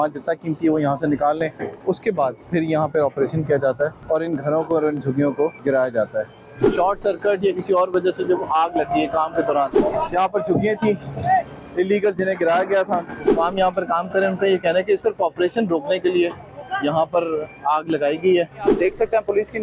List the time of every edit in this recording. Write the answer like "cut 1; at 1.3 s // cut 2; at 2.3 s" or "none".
cut 1; at 2.1 s // cut 2; at 4.0 s // cut 3; at 5.6 s // cut 4; at 6.7 s // cut 5; at 9.8 s // cut 6; at 13.3 s // cut 7; at 18.7 s